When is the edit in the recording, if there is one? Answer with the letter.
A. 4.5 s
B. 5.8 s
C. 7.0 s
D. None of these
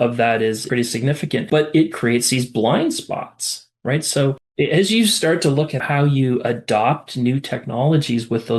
A